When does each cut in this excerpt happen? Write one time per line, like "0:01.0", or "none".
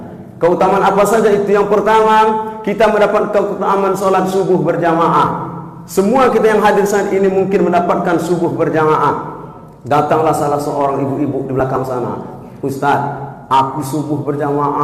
none

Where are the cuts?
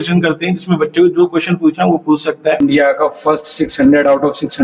0:02.6

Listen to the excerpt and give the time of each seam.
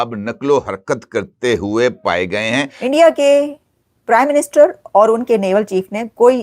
0:02.7

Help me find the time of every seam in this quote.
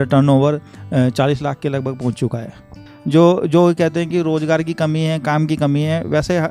0:02.7

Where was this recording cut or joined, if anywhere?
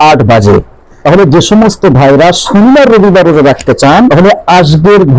0:01.0
0:04.1

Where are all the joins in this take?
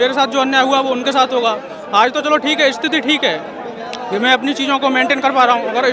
none

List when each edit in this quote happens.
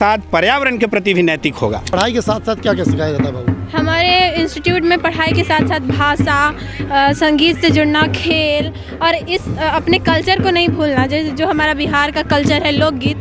0:01.9

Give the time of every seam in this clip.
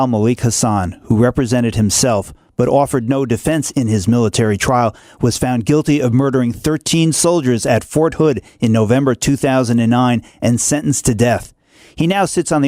none

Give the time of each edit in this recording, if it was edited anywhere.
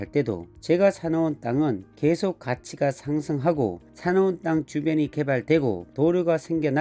none

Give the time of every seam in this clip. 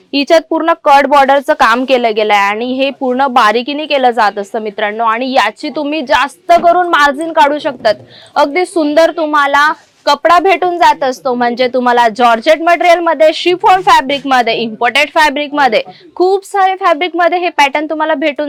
none

